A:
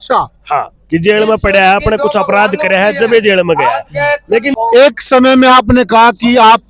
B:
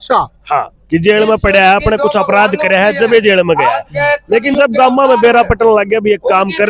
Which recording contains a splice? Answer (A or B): A